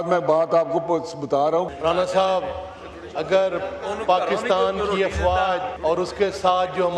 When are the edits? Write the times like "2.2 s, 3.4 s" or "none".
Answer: 1.7 s, 5.7 s